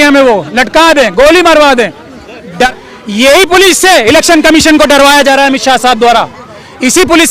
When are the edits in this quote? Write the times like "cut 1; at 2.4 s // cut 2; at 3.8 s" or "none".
cut 1; at 2.7 s

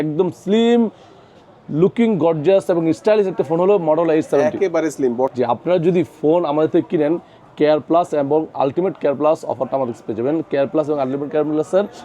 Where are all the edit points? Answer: cut 1; at 5.3 s

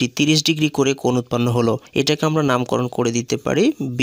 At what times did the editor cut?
none

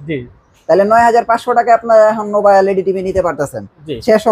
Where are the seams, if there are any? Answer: none

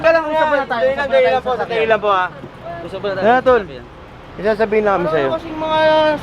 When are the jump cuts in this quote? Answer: none

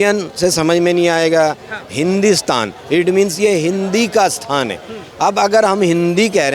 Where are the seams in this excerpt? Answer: none

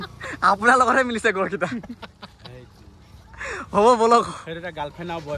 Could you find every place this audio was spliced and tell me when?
none

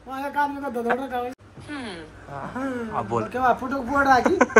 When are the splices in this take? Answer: cut 1; at 1.4 s

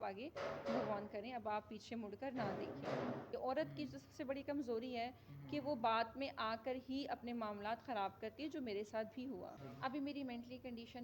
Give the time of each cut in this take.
cut 1; at 3.3 s // cut 2; at 9.6 s

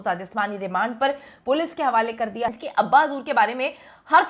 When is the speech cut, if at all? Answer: cut 1; at 2.5 s

